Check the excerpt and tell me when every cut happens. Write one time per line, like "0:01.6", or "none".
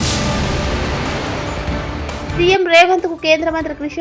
0:02.3